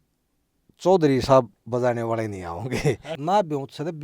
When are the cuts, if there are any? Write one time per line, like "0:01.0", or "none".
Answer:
0:03.1